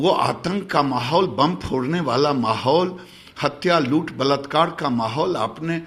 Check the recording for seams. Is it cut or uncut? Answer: uncut